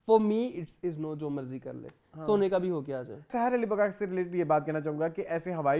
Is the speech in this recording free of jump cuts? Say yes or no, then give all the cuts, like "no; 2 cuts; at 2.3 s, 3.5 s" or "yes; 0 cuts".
no; 1 cut; at 3.3 s